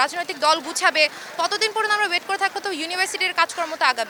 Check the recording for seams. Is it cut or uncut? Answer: uncut